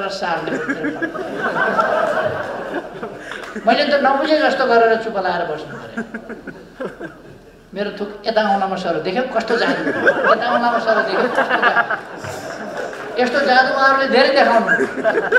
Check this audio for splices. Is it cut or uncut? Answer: uncut